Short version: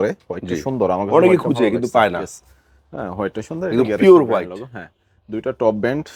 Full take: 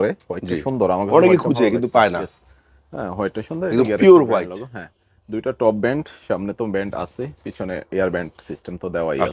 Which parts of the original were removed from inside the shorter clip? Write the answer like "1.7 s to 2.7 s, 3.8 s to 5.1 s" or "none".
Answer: none